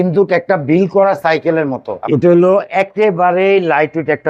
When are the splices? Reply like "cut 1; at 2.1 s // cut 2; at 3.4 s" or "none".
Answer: cut 1; at 2.0 s